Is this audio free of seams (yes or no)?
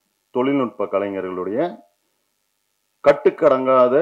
yes